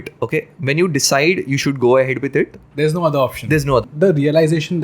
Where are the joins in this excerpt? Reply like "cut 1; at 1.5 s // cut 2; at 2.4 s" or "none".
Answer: cut 1; at 3.8 s